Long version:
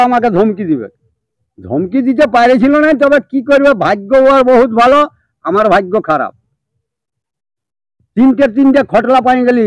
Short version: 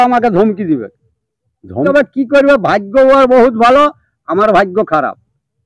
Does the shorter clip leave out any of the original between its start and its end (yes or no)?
yes